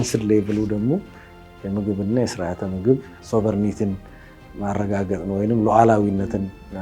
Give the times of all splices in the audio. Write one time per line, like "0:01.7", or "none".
0:03.1